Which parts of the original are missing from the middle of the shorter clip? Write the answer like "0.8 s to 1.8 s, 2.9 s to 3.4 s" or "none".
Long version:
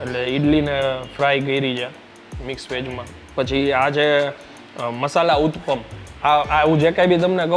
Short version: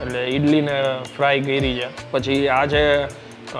2.0 s to 3.2 s